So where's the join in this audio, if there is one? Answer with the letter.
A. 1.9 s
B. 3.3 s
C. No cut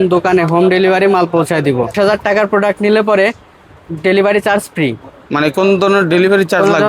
A